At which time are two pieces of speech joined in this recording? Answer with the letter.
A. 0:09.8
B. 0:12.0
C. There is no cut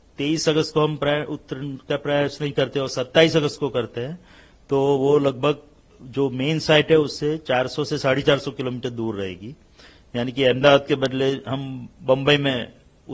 C